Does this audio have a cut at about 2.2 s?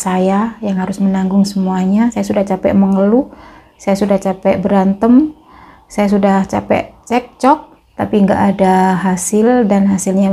yes; 2 cuts; at 2.2 s, 7.8 s

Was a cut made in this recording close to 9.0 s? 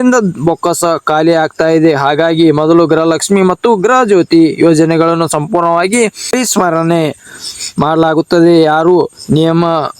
no; 1 cut; at 6.3 s

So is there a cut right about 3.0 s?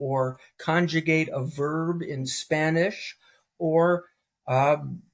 no; 0 cuts

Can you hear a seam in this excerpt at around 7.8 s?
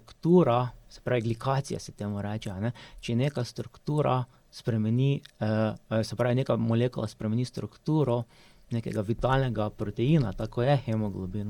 no; 0 cuts

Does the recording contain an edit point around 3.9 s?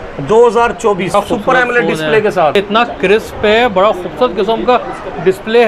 no; 2 cuts; at 1.1 s, 2.6 s

